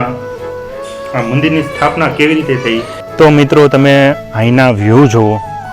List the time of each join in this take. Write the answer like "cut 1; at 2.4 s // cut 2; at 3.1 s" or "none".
cut 1; at 3.0 s

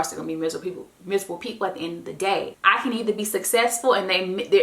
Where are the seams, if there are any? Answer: cut 1; at 2.5 s

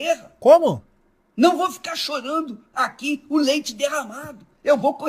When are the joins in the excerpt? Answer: cut 1; at 1.9 s

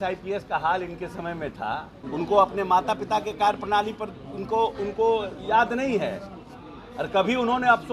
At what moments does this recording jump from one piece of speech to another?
cut 1; at 2.0 s

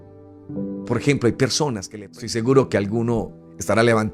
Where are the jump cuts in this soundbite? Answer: cut 1; at 1.9 s

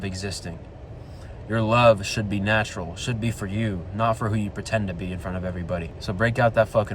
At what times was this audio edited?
cut 1; at 5.9 s

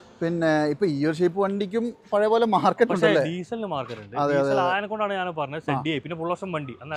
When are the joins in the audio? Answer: none

